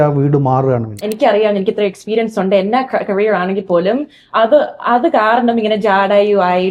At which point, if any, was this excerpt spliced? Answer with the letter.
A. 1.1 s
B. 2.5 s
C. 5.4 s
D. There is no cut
A